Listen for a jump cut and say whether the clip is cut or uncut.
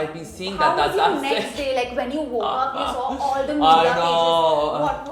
uncut